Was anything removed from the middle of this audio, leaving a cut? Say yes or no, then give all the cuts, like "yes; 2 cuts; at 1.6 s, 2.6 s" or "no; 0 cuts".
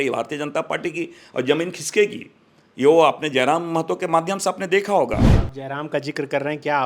yes; 1 cut; at 5.3 s